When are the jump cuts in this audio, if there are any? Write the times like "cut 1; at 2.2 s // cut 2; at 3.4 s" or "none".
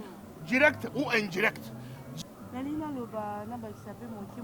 cut 1; at 2.0 s